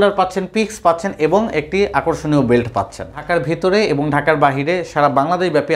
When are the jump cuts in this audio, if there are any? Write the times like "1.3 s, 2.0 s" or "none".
3.3 s